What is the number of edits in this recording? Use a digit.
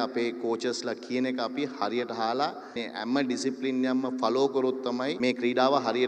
2